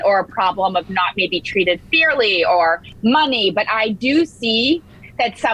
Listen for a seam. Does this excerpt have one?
no; 0 cuts

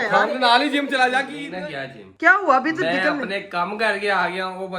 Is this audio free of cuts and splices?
no; 1 cut; at 1.4 s

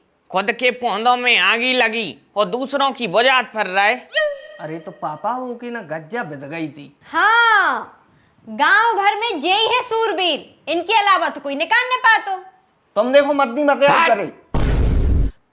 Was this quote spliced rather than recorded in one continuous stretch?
no; 0 cuts

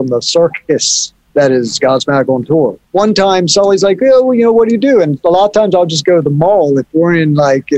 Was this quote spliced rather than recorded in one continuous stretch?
yes; 1 cut; at 2.8 s

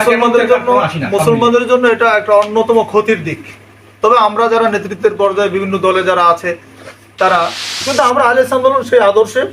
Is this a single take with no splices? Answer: no; 1 cut; at 7.8 s

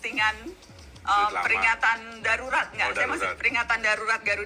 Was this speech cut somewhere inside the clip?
no; 0 cuts

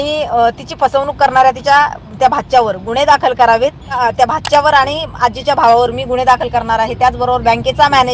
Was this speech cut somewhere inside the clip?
yes; 1 cut; at 4.0 s

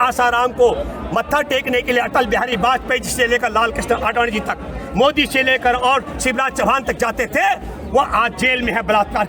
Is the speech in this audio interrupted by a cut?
no; 0 cuts

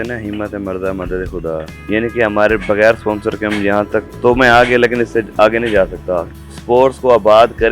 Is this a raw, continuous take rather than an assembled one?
no; 2 cuts; at 1.7 s, 6.3 s

